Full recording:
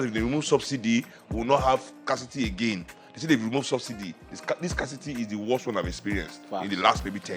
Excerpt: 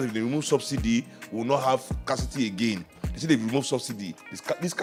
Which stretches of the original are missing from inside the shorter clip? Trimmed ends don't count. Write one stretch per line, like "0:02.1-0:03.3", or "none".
none